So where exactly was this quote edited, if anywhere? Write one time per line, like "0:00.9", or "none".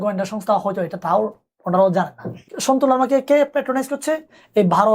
0:02.5